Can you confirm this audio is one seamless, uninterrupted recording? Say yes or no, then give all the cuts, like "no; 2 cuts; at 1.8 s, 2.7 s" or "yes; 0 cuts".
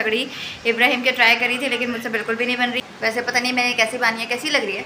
yes; 0 cuts